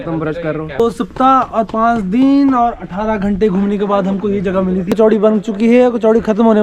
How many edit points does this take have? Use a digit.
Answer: 2